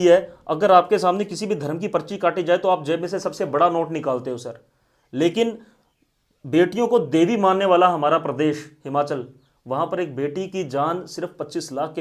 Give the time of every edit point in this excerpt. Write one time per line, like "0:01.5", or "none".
none